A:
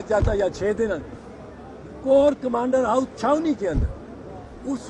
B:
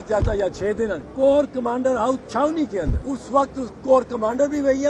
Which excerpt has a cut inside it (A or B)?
B